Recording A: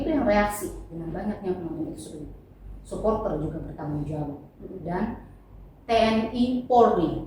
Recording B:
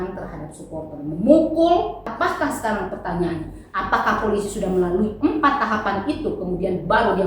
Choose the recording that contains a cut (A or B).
B